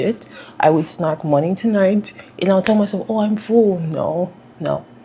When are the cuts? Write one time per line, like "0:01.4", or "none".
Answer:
none